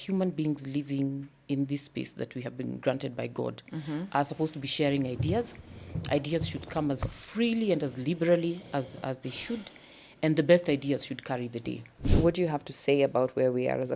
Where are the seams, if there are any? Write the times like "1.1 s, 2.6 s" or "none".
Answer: 12.1 s